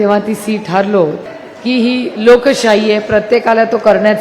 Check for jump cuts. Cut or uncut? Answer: cut